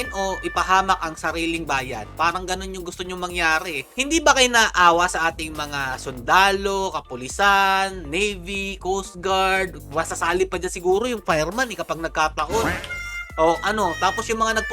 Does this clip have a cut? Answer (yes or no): no